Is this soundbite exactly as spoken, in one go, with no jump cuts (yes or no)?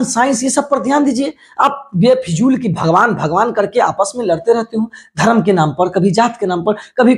yes